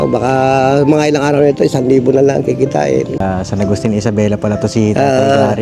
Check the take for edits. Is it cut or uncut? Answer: cut